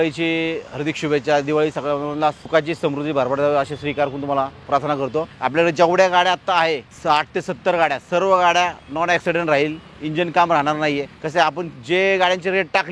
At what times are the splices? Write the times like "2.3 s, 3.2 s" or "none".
2.4 s, 5.3 s, 6.9 s, 11.2 s